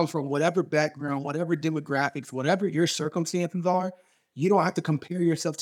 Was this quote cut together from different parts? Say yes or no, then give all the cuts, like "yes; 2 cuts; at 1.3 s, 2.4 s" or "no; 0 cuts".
no; 0 cuts